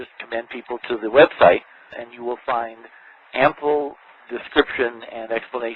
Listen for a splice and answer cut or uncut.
uncut